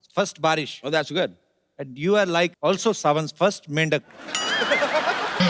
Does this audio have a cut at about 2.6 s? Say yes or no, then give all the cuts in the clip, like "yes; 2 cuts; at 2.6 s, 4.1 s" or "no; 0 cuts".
yes; 1 cut; at 2.6 s